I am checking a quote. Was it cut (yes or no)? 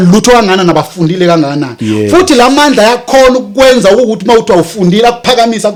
no